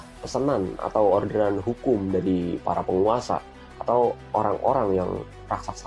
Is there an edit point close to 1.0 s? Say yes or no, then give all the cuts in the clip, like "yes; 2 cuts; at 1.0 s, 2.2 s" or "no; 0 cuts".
no; 0 cuts